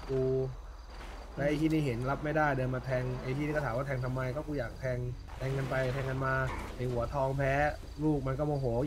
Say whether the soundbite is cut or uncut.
cut